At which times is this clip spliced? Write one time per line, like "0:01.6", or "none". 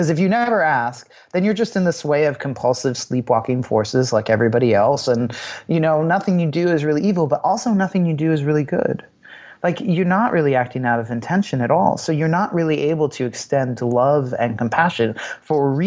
none